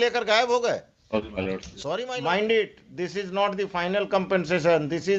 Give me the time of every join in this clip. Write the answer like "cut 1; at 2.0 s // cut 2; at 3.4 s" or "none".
cut 1; at 1.7 s